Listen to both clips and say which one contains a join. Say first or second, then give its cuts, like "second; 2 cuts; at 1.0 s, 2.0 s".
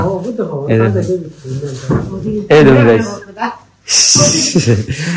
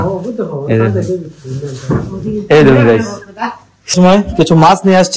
second; 1 cut; at 3.9 s